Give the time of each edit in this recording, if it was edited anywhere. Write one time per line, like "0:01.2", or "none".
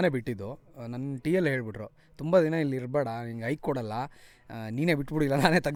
none